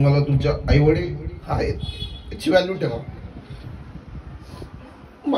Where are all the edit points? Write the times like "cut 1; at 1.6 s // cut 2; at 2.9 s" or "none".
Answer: none